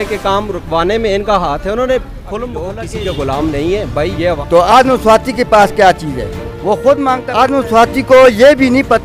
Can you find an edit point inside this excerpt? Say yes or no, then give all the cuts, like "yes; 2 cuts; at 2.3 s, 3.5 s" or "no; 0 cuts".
yes; 3 cuts; at 2.8 s, 4.4 s, 7.2 s